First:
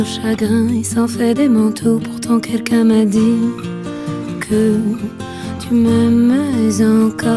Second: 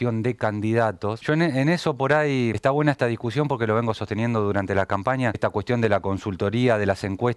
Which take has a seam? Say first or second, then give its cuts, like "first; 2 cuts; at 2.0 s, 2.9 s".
second; 3 cuts; at 1.2 s, 2.6 s, 5.4 s